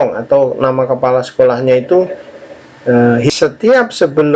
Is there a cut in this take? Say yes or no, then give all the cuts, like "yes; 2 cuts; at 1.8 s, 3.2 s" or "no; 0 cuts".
yes; 1 cut; at 3.3 s